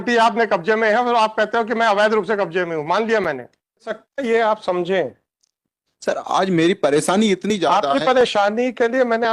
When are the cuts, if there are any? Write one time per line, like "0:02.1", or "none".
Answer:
0:04.0

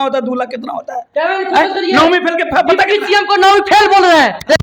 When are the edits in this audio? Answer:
none

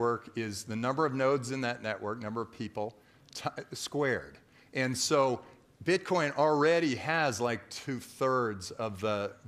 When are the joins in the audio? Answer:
none

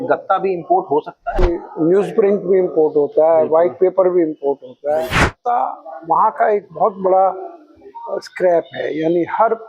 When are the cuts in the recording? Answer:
0:01.4
0:05.3

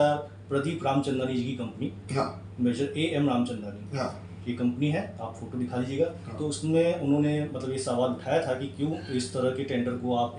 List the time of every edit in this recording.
none

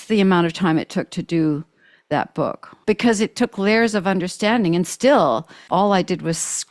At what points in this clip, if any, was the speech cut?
0:02.7
0:05.5

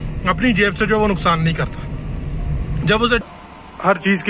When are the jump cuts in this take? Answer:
0:03.2

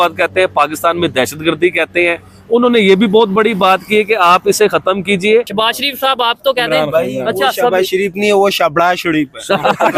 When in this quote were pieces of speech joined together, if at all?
0:05.5

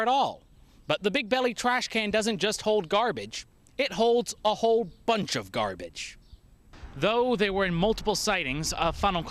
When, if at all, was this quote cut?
0:06.7

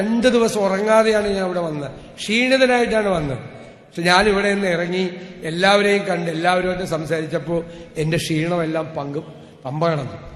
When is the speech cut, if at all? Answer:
none

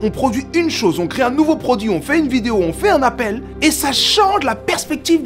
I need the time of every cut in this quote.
none

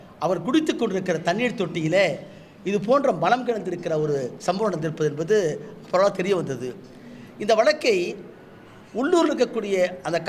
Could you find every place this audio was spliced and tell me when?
none

